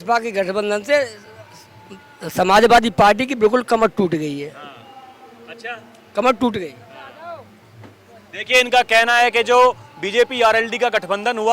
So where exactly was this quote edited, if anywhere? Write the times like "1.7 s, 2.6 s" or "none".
none